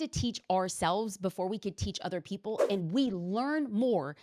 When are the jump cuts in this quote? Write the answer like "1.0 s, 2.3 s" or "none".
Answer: none